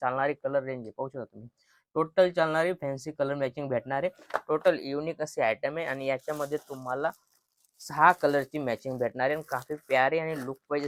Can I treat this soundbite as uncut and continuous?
yes; 0 cuts

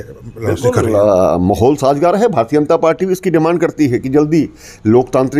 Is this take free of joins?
yes; 0 cuts

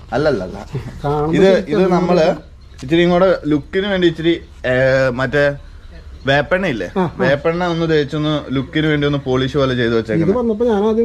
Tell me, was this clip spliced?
no; 0 cuts

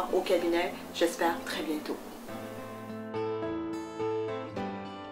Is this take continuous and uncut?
yes; 0 cuts

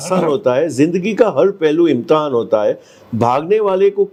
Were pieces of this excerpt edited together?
no; 0 cuts

